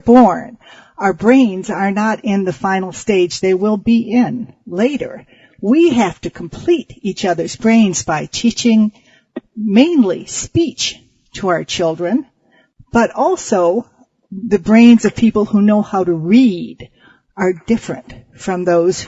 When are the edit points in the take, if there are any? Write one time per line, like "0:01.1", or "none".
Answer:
none